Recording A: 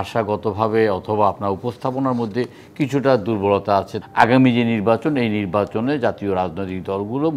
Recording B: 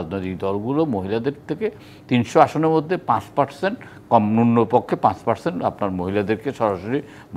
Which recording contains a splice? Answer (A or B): A